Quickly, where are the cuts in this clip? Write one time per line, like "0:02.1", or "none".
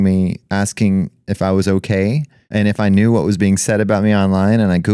0:02.3